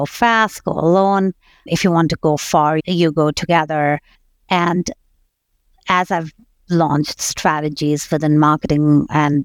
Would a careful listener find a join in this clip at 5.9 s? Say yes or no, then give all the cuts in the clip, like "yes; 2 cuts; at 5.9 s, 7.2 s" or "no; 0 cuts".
no; 3 cuts; at 1.7 s, 2.8 s, 4.1 s